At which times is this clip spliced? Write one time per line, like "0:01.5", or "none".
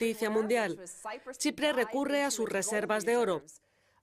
0:02.6